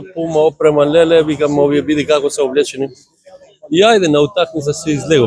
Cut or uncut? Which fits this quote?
uncut